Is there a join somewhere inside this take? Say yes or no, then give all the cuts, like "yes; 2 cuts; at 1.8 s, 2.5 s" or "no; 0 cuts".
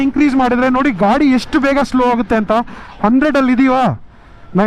no; 0 cuts